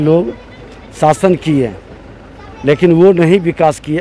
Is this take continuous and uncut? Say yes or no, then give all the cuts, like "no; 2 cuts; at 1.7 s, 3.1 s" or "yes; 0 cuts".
yes; 0 cuts